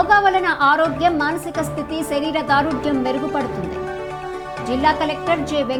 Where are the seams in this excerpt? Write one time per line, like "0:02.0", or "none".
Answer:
none

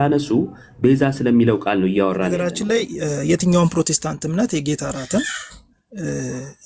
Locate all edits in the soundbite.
0:02.5

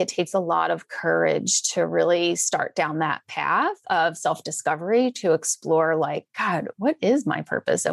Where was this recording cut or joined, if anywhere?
none

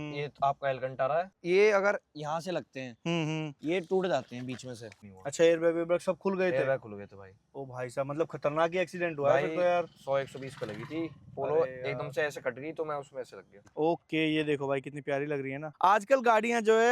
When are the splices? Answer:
0:01.4
0:04.9
0:13.6
0:15.7

